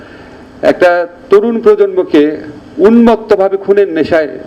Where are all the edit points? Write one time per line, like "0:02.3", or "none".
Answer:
none